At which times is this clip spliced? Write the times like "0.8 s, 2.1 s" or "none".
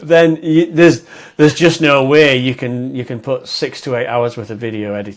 none